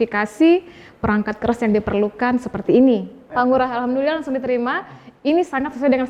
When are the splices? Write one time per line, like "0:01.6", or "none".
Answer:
0:03.2